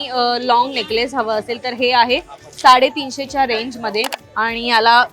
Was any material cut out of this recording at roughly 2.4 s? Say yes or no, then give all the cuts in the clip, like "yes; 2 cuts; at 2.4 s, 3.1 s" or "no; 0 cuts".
no; 1 cut; at 4.2 s